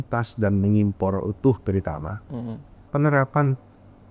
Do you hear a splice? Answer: yes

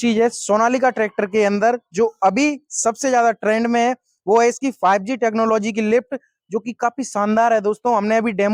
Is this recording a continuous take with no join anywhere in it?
yes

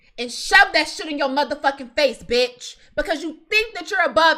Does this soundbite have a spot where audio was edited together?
no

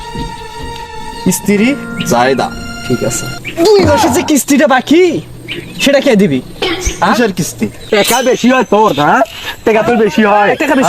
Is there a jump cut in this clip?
yes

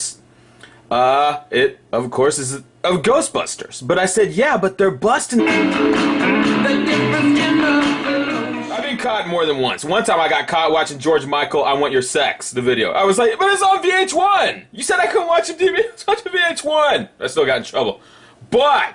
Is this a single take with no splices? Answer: yes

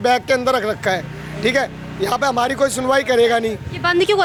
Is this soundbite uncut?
yes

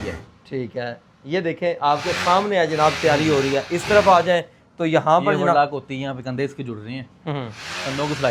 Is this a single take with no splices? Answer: yes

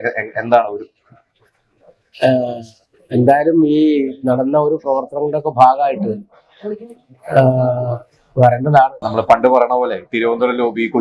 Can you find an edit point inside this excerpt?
yes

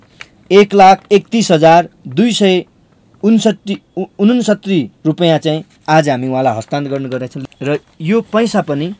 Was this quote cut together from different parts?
yes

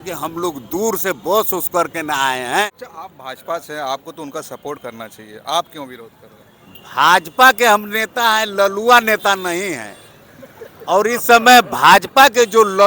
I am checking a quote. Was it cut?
yes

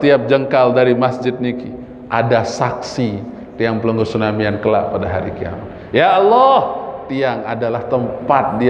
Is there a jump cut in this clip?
no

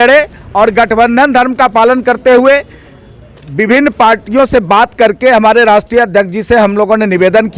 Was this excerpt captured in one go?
yes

